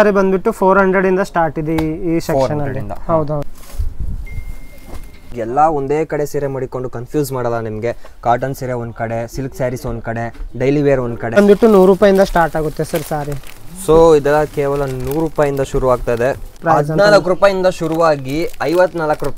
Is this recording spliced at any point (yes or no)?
yes